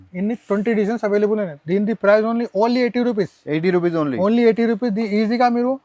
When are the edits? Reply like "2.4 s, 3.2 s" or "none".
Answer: none